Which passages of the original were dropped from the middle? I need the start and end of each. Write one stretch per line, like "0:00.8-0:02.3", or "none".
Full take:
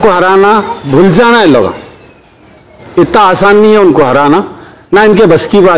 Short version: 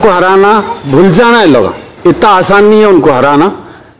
0:01.8-0:02.8